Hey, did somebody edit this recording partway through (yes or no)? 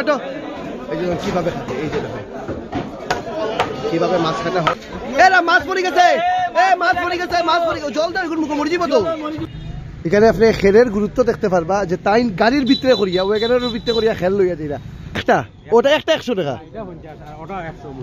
yes